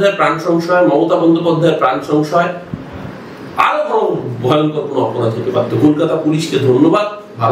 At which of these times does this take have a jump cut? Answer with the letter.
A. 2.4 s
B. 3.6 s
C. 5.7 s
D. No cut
D